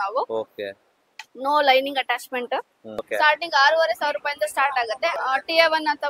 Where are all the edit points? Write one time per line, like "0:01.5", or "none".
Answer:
0:03.1
0:05.2